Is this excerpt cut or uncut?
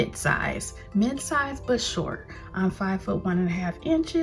uncut